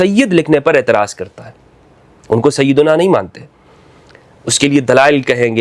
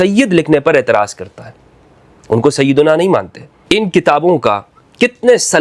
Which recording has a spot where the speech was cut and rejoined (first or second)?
second